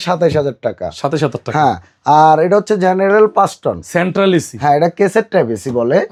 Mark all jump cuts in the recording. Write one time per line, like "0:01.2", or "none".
none